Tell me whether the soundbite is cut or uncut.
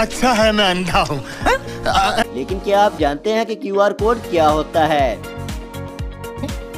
cut